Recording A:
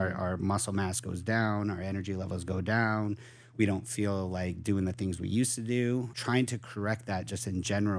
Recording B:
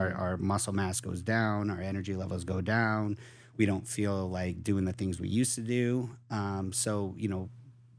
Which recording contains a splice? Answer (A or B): A